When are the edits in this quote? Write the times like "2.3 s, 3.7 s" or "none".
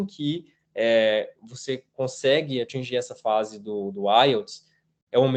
none